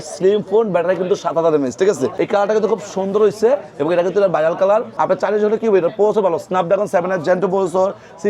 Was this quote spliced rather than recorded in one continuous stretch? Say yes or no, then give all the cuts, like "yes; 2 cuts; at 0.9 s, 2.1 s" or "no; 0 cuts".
yes; 2 cuts; at 2.1 s, 4.9 s